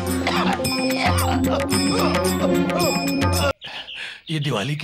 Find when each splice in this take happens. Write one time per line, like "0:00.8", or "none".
0:03.5